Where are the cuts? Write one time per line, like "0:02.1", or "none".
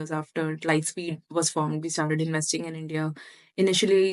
none